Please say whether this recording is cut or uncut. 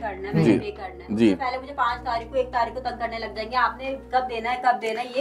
uncut